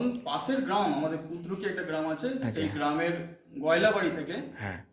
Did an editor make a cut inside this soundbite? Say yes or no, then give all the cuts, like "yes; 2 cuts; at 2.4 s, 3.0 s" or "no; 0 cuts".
no; 0 cuts